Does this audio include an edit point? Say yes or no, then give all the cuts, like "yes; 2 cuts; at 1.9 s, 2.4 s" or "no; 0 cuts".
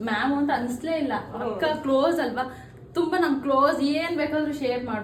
no; 0 cuts